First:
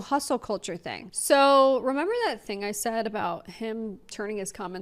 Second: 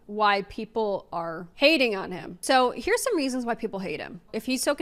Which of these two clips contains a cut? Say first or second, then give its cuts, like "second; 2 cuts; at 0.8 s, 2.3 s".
first; 1 cut; at 1.0 s